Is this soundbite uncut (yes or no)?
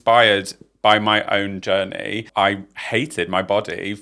no